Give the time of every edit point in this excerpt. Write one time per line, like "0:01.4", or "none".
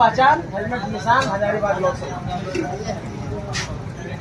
none